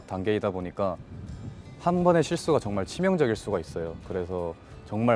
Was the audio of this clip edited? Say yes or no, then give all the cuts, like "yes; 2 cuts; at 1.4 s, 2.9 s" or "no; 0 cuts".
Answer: no; 0 cuts